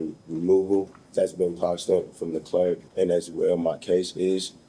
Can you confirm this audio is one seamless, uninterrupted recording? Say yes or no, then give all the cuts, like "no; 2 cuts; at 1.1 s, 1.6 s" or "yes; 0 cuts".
no; 2 cuts; at 1.0 s, 2.9 s